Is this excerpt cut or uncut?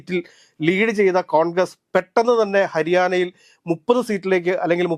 uncut